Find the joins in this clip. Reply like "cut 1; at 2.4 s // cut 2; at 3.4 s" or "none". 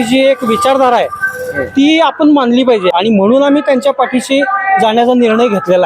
cut 1; at 2.9 s